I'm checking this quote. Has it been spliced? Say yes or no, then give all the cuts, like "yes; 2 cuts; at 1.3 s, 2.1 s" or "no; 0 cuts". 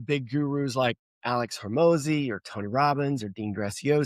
yes; 1 cut; at 1.1 s